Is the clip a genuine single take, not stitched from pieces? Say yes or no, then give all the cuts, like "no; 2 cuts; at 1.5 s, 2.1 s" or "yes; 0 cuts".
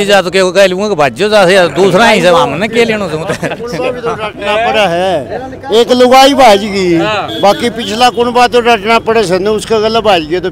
yes; 0 cuts